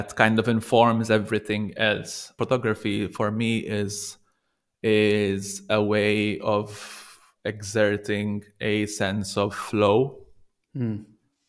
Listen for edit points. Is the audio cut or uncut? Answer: cut